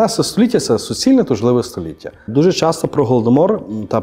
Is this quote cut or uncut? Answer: cut